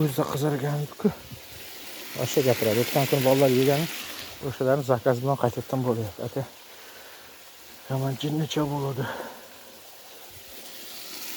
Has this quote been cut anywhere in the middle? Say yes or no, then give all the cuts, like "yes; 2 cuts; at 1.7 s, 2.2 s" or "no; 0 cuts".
no; 0 cuts